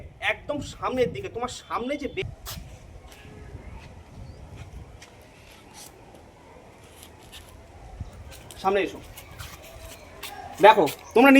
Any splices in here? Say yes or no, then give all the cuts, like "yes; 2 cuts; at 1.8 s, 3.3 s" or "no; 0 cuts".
yes; 1 cut; at 2.2 s